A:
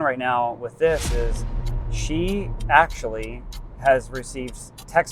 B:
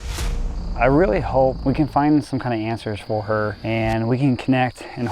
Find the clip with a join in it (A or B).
B